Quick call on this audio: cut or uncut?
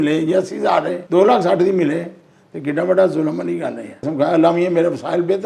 cut